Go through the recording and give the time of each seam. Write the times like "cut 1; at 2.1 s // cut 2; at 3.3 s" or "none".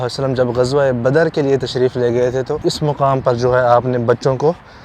cut 1; at 2.6 s